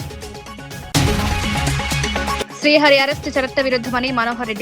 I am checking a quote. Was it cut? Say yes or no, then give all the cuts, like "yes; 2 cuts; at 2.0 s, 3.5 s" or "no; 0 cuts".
yes; 2 cuts; at 0.9 s, 2.4 s